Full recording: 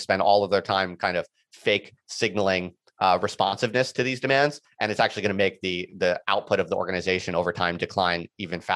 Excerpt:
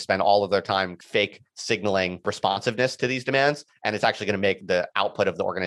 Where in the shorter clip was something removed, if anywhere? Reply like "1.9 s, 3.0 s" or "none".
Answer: 0.9 s, 2.2 s, 4.6 s